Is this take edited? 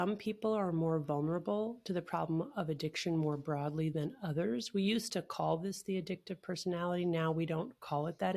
no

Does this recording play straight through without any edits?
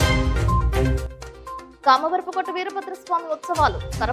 no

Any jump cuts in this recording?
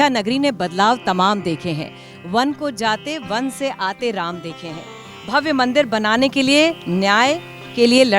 no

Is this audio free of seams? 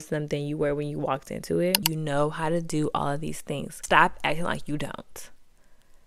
no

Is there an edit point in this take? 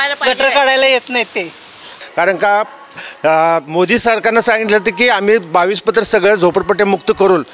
yes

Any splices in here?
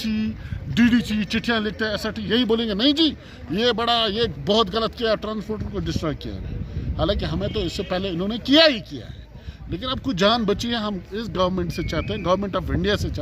no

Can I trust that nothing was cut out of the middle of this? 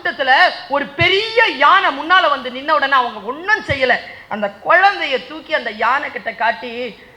yes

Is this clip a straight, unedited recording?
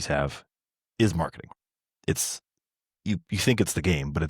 no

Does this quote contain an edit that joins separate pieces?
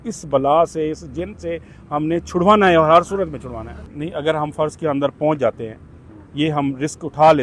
yes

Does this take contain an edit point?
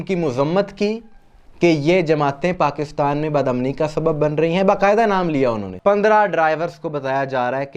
yes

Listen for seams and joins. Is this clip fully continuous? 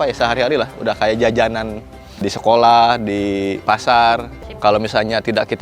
no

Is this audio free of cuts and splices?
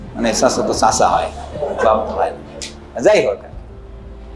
yes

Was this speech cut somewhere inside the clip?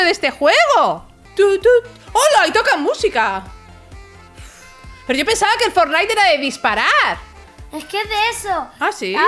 no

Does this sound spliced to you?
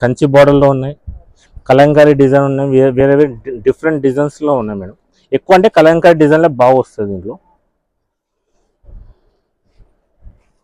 no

